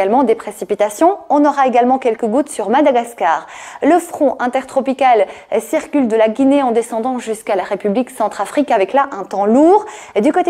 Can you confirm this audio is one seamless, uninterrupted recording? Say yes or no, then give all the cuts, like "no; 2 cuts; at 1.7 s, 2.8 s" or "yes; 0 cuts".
no; 1 cut; at 0.9 s